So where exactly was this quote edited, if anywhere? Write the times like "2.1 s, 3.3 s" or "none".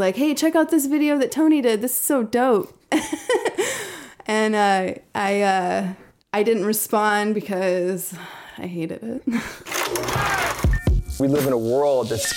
9.7 s